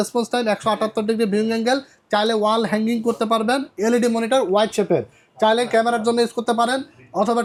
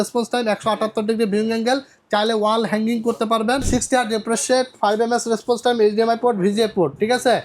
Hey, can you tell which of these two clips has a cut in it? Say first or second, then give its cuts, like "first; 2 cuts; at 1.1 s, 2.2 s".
second; 1 cut; at 3.7 s